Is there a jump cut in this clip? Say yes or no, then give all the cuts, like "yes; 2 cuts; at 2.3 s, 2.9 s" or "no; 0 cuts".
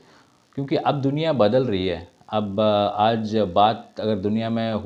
no; 0 cuts